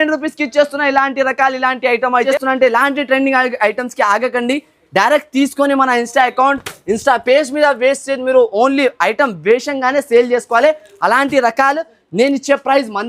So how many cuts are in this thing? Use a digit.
1